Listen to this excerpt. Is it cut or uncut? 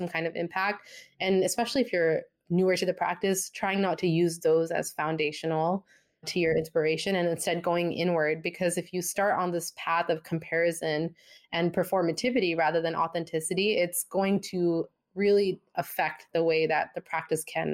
cut